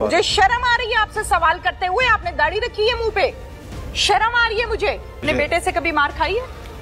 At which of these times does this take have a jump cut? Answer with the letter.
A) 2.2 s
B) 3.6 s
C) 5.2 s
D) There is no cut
C